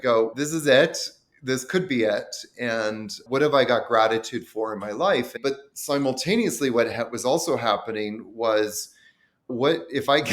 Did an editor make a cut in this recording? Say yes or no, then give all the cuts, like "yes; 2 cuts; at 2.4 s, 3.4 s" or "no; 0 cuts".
yes; 1 cut; at 5.4 s